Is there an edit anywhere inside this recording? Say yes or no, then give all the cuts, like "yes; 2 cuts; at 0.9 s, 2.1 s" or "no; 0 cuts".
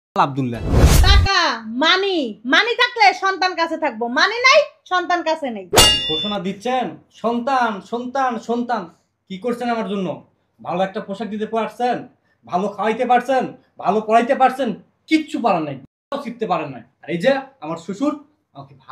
yes; 2 cuts; at 0.9 s, 5.7 s